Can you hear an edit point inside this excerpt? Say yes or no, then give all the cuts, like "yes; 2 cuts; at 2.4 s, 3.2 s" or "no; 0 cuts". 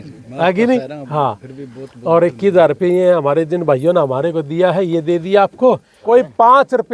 yes; 1 cut; at 5.9 s